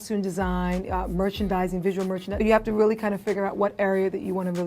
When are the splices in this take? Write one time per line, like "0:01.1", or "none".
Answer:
0:02.4